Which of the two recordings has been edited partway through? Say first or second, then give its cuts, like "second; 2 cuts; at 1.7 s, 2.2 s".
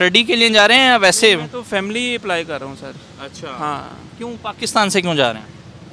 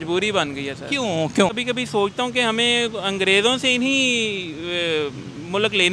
second; 1 cut; at 1.6 s